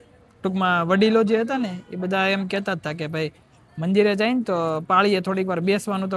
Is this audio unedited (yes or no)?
yes